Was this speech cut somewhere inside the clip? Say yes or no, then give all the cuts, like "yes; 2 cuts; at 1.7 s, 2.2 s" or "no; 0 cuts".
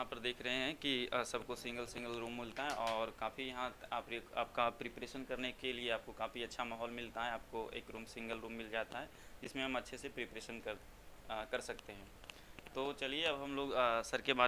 no; 0 cuts